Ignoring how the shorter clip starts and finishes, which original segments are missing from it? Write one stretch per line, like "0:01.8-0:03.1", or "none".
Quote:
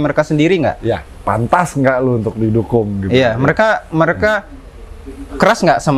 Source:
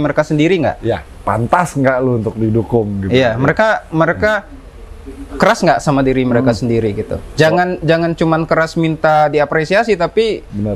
none